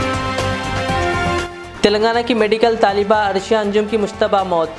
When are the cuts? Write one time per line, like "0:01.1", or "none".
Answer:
none